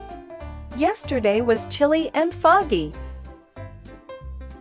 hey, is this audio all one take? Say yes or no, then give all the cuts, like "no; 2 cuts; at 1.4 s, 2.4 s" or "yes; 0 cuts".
yes; 0 cuts